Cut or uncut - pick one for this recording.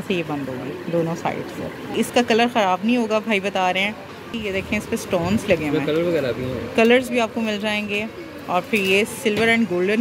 cut